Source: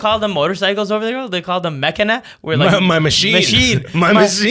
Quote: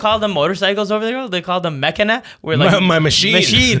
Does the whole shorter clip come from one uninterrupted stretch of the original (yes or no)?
yes